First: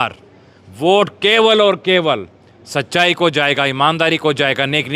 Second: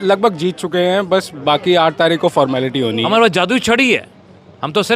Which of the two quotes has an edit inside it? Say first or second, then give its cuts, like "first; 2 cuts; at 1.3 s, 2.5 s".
second; 1 cut; at 3.0 s